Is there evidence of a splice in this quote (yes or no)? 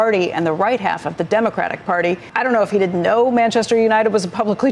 yes